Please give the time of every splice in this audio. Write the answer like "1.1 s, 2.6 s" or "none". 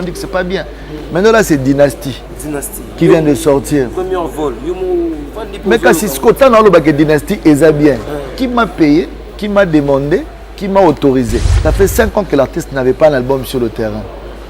11.5 s

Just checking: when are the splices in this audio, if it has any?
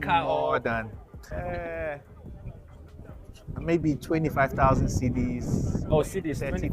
1.3 s

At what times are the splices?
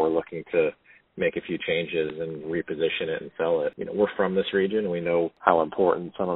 3.8 s, 5.3 s

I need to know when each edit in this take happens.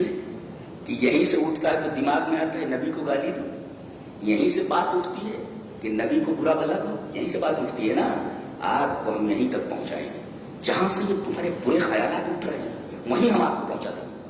none

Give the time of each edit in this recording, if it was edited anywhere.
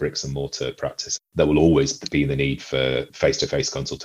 1.3 s, 3.1 s

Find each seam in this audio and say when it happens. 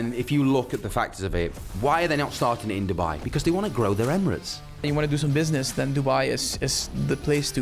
4.8 s

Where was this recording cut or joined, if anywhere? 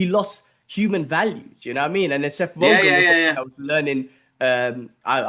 none

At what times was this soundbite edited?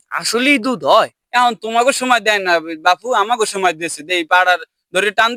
none

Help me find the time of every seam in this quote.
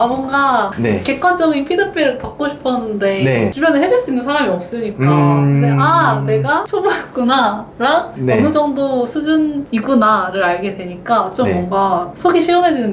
none

